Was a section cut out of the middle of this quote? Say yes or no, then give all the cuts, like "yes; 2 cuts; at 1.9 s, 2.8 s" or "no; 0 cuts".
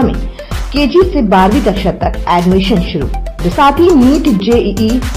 yes; 1 cut; at 3.5 s